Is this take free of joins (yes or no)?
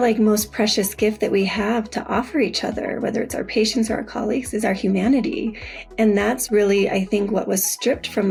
yes